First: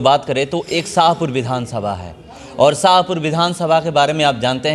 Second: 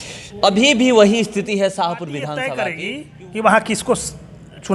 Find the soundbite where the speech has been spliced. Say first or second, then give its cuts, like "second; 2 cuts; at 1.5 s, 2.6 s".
second; 1 cut; at 2.5 s